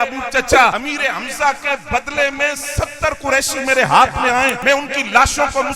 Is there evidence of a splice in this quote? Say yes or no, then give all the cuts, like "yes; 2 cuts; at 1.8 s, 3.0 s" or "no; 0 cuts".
yes; 2 cuts; at 0.8 s, 4.6 s